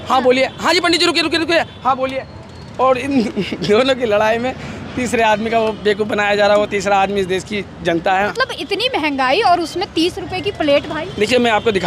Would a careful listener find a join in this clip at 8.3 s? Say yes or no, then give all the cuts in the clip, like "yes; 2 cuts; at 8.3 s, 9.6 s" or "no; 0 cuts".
yes; 1 cut; at 8.3 s